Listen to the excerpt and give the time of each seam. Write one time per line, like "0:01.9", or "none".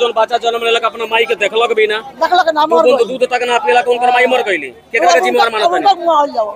none